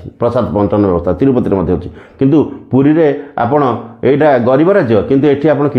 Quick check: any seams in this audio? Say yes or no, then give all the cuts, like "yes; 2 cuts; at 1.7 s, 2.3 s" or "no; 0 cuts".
no; 0 cuts